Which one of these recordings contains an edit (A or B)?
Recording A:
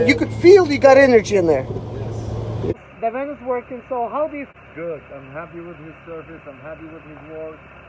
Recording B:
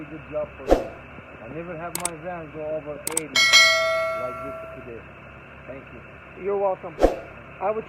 A